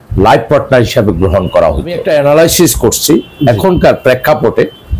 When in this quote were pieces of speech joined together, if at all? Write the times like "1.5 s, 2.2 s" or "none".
2.0 s

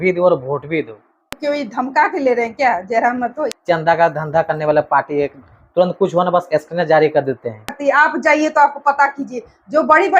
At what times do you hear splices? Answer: 1.4 s, 3.5 s, 7.8 s

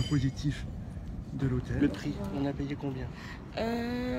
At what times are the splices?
1.7 s

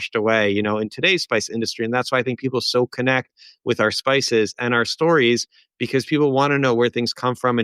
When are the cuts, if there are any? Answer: none

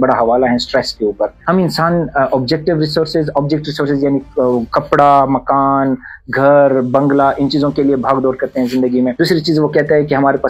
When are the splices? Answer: 1.3 s, 9.1 s

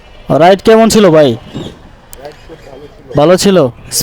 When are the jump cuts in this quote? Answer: none

